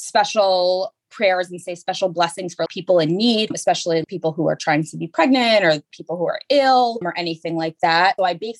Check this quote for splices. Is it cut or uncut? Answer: uncut